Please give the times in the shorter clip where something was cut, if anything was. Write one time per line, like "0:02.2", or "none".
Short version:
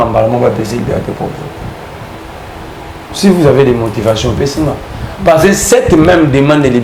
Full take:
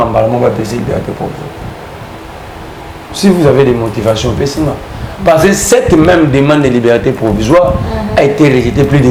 none